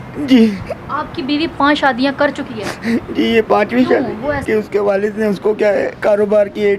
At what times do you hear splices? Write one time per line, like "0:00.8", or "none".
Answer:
0:04.4
0:05.9